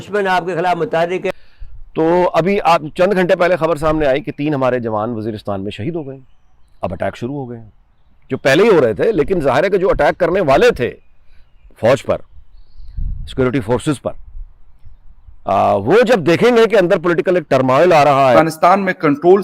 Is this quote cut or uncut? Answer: cut